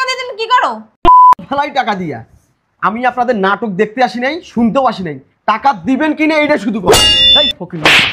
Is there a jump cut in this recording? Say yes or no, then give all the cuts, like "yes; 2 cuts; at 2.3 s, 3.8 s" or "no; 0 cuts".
yes; 1 cut; at 7.1 s